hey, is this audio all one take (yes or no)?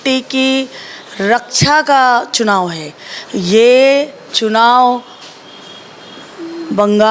yes